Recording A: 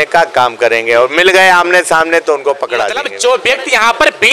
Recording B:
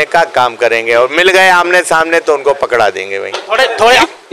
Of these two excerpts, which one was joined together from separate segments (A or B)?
A